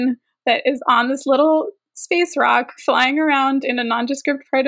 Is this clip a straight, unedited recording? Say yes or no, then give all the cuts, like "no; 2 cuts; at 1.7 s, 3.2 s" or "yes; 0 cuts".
yes; 0 cuts